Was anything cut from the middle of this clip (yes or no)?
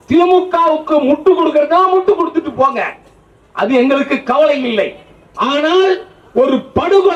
no